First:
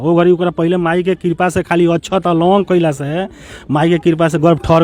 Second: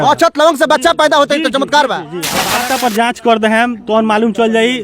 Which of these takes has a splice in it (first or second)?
second